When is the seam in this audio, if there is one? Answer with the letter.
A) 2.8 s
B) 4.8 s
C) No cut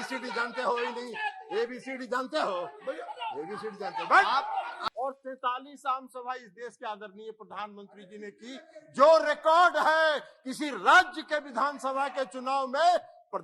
B